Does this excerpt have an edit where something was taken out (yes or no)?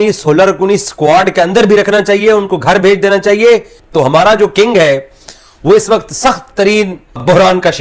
yes